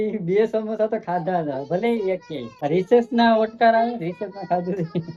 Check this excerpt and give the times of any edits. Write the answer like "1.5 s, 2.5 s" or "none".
2.4 s